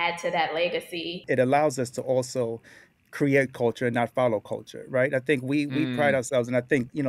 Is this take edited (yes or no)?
yes